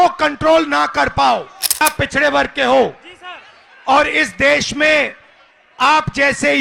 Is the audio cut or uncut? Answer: cut